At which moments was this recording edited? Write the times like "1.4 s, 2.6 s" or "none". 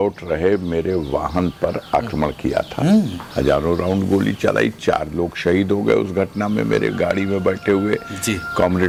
none